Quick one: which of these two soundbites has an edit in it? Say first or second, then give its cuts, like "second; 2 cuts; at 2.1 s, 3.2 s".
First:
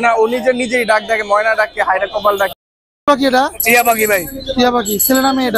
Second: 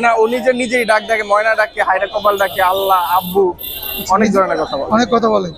first; 1 cut; at 2.5 s